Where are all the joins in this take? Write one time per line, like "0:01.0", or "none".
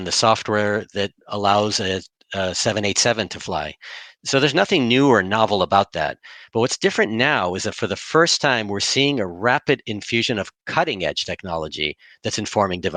none